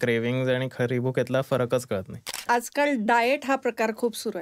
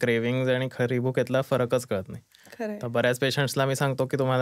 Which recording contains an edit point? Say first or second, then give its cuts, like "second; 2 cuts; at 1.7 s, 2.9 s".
first; 1 cut; at 2.4 s